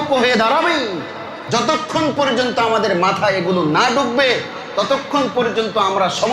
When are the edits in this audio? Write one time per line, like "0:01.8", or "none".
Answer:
0:01.3